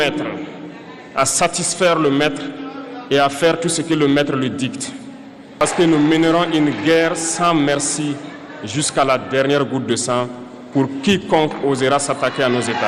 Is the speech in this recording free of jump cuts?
no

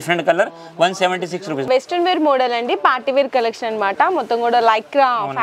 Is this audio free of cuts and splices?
no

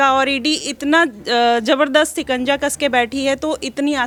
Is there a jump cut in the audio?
no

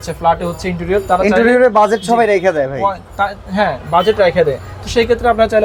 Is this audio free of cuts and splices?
yes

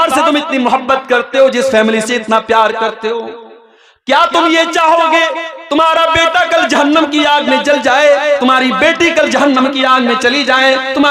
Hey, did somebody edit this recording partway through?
no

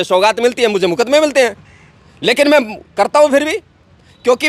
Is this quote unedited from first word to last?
yes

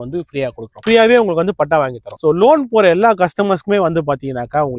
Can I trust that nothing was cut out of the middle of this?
no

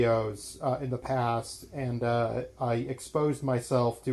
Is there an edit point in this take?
no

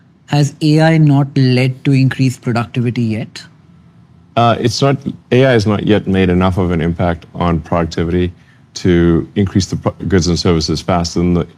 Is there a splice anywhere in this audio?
no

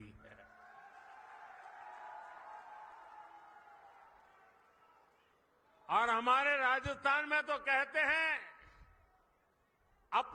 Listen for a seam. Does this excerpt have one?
no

